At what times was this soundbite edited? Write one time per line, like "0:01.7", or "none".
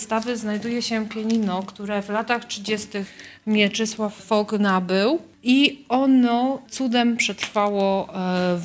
0:04.2
0:05.3
0:06.6